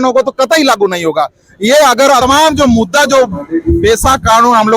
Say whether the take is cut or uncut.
cut